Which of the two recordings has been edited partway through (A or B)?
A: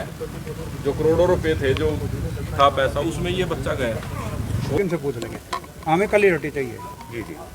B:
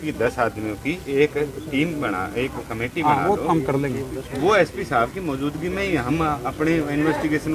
A